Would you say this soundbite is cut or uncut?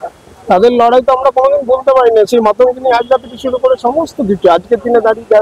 uncut